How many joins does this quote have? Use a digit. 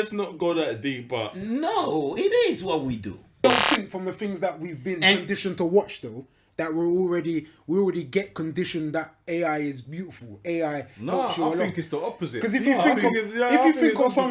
1